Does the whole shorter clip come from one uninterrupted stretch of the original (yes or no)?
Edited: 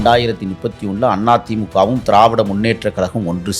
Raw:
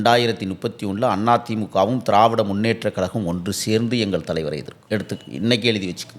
yes